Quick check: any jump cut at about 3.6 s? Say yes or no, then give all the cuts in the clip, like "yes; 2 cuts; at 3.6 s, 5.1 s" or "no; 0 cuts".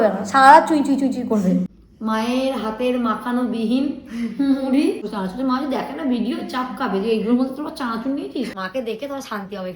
no; 3 cuts; at 1.8 s, 5.1 s, 8.5 s